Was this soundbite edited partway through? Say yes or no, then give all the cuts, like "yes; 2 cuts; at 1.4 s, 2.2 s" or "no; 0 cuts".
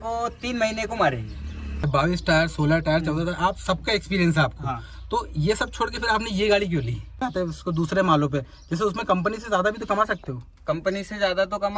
yes; 2 cuts; at 1.8 s, 7.2 s